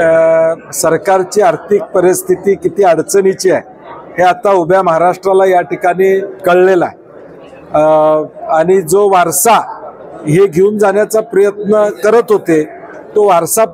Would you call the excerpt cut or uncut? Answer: uncut